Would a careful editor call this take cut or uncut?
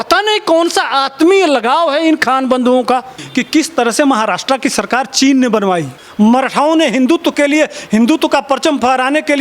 cut